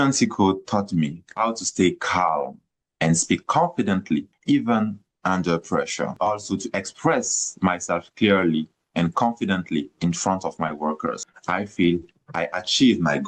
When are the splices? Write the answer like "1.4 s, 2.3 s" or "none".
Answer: 6.2 s, 11.3 s